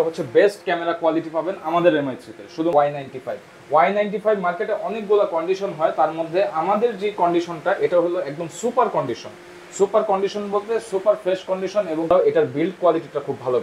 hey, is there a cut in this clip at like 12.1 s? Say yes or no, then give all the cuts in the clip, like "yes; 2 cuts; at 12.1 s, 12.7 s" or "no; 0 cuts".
yes; 2 cuts; at 2.7 s, 12.1 s